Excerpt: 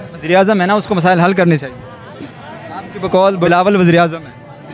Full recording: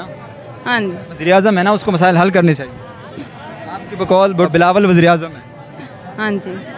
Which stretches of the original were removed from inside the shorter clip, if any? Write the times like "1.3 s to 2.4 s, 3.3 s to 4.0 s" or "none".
4.4 s to 4.6 s